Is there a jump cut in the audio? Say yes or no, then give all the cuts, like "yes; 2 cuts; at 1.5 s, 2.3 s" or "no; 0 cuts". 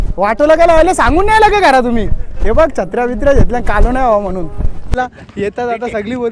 yes; 1 cut; at 5.0 s